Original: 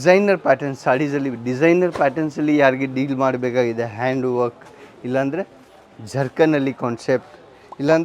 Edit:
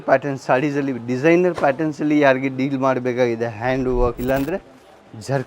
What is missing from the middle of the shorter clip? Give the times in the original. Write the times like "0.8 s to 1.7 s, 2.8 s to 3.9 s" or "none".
4.5 s to 5.0 s

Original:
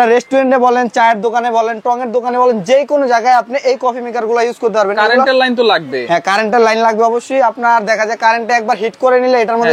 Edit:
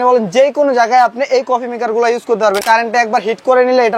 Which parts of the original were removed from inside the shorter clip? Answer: 4.9 s to 8.2 s

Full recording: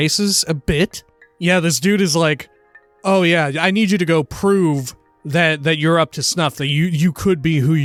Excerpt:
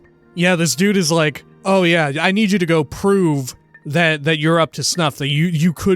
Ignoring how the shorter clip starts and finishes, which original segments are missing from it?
2.5 s to 2.9 s

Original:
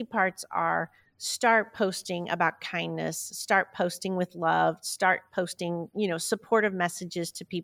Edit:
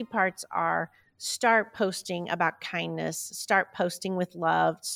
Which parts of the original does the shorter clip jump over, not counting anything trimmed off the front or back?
none

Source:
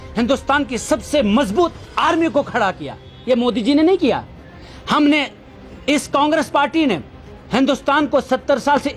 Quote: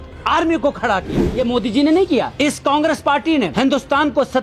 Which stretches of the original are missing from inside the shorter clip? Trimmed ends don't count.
2.9 s to 3.1 s, 4.2 s to 5.8 s, 7.0 s to 7.5 s

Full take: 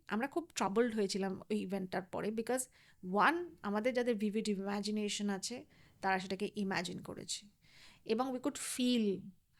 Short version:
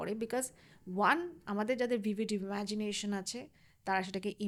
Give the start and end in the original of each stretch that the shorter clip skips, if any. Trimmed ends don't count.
none

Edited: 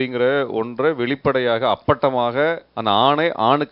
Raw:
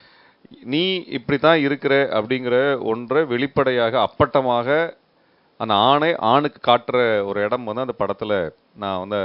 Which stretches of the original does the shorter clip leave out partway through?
5.0 s to 5.5 s

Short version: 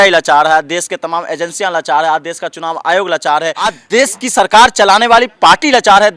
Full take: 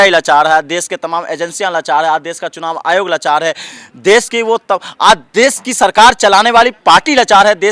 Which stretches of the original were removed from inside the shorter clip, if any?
3.8 s to 5.2 s

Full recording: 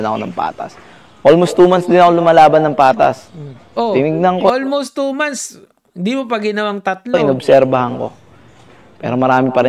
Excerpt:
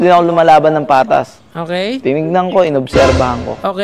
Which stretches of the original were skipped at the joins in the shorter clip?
4.5 s to 7.1 s

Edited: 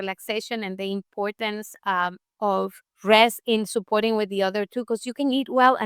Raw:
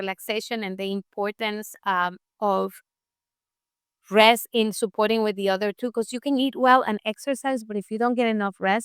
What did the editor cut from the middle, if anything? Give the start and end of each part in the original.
2.9 s to 3.9 s

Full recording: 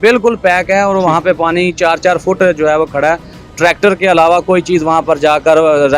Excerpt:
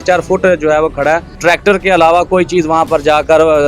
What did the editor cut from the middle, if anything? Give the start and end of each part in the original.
3.3 s to 3.5 s

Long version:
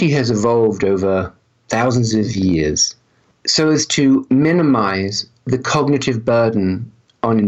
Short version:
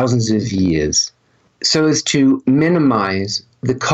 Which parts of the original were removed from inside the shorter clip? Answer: none

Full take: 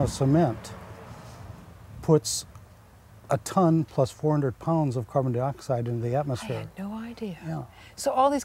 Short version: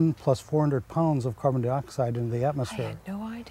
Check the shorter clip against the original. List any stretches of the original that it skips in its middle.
none

